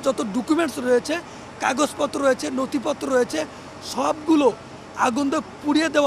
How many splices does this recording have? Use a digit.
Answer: 0